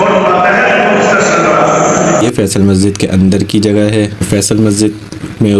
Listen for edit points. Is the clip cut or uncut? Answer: uncut